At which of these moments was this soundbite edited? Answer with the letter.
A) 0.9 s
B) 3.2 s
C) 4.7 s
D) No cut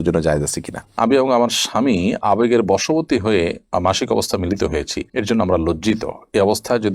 A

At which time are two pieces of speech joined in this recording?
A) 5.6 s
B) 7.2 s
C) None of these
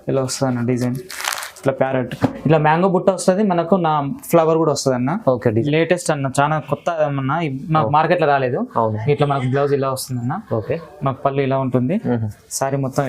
A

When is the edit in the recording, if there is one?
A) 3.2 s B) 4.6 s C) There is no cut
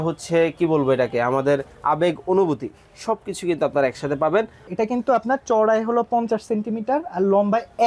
B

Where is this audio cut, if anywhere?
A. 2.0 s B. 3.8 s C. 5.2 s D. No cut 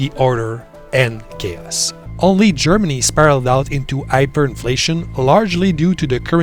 A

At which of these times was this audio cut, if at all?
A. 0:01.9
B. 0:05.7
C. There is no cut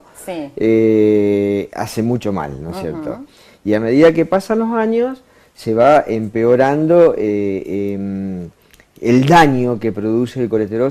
C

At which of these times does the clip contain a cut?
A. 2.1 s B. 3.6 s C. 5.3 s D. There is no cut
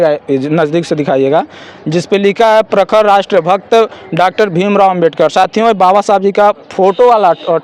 D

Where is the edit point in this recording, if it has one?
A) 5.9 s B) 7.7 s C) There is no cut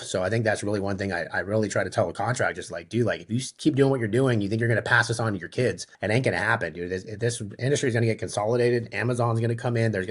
A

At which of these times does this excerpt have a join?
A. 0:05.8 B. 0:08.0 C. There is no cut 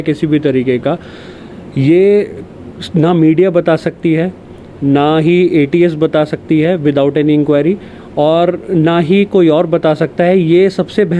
C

